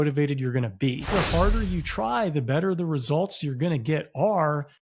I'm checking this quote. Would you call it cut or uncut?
cut